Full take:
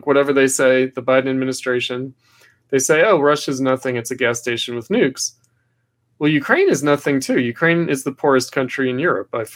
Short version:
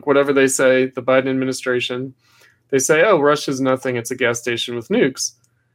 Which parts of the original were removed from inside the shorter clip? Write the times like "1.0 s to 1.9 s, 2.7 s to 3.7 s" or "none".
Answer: none